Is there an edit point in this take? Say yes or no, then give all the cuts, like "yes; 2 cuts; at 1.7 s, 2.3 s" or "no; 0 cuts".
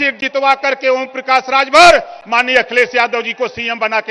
no; 0 cuts